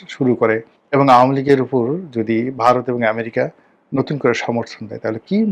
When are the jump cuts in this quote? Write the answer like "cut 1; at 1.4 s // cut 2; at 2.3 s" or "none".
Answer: none